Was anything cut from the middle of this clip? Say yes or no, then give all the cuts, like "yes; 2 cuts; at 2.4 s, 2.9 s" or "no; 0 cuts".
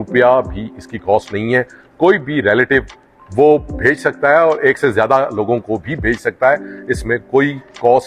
no; 0 cuts